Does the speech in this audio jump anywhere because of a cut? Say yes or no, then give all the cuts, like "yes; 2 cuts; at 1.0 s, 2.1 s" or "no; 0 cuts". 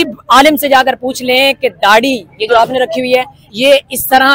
yes; 1 cut; at 3.4 s